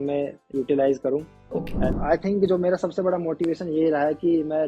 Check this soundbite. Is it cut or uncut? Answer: cut